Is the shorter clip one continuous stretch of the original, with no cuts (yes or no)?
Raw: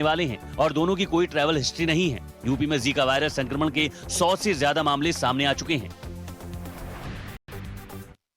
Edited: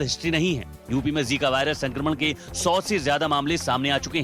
yes